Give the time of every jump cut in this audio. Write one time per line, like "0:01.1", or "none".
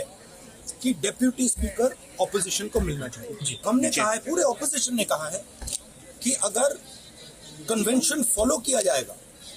0:03.6

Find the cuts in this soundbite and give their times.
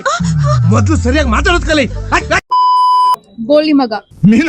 0:03.1

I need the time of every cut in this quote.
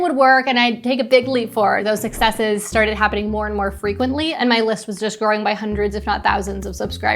0:01.8
0:04.3

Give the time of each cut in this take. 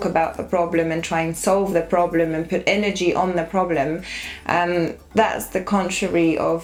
none

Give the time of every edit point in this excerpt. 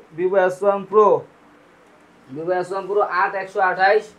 none

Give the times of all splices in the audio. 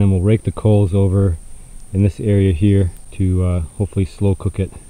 0:03.0

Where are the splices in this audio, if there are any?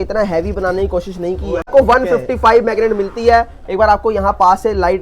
0:01.7

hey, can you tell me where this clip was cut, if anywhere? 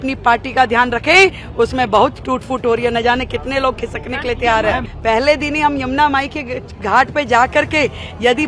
0:04.9

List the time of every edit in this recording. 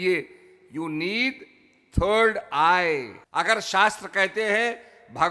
0:03.2

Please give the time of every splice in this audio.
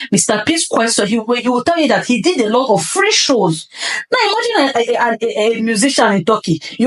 none

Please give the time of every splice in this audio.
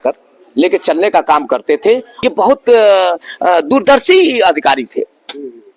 0:02.1

